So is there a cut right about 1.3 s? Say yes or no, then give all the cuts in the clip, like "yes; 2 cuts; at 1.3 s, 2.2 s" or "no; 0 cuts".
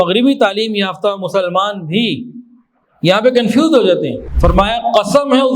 no; 1 cut; at 4.2 s